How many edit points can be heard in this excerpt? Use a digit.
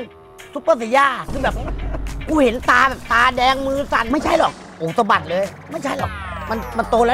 1